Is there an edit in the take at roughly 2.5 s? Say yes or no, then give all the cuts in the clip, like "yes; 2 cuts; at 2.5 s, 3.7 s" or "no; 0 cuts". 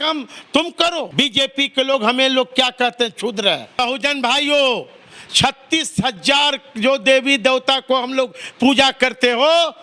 no; 2 cuts; at 1.1 s, 3.7 s